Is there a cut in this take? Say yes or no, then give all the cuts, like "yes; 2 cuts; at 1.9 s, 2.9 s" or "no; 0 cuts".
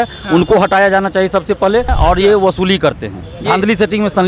yes; 1 cut; at 1.9 s